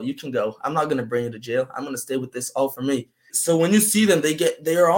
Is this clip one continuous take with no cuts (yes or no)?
no